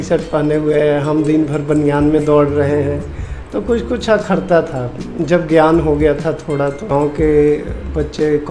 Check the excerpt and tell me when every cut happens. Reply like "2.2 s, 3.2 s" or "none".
6.8 s